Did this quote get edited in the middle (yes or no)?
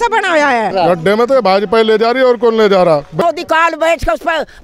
yes